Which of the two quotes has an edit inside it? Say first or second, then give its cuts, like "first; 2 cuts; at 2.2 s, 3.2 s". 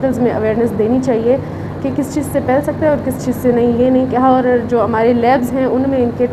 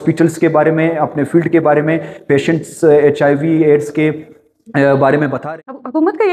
second; 1 cut; at 5.4 s